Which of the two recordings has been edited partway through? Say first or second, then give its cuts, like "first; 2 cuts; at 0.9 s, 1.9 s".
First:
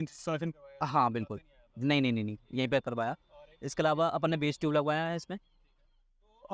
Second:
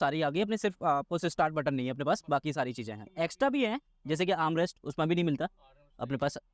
second; 1 cut; at 3.0 s